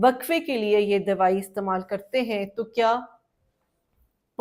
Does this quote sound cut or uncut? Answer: uncut